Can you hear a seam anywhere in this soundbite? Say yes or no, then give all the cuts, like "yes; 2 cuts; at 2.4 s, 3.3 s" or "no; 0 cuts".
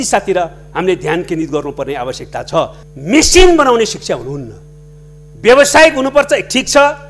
yes; 1 cut; at 2.8 s